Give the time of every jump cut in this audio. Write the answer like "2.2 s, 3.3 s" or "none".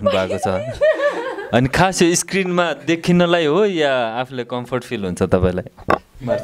none